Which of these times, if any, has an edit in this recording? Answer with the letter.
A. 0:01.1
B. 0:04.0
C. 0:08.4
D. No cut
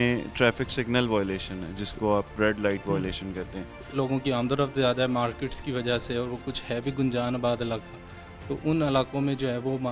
B